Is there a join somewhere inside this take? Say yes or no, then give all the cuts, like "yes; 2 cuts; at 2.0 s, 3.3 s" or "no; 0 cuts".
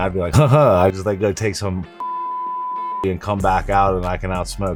no; 0 cuts